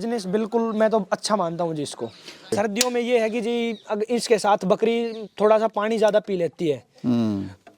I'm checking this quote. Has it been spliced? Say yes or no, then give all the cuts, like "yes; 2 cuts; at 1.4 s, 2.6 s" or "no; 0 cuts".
yes; 1 cut; at 2.5 s